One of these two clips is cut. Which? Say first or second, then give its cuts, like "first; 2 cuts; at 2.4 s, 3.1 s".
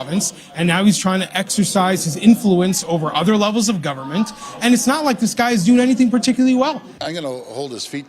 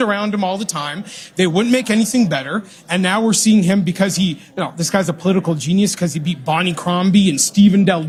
first; 1 cut; at 7.0 s